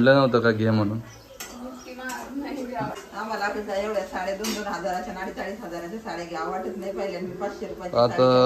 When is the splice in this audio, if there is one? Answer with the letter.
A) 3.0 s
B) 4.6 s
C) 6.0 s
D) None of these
A